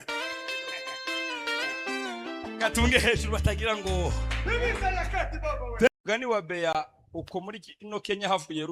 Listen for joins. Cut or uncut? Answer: cut